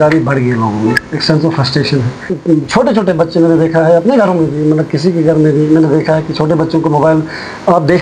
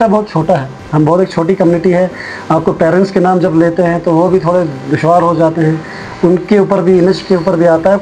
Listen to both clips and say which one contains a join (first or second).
first